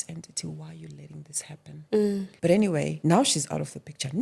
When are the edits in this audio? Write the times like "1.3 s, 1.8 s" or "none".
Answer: 2.3 s, 3.0 s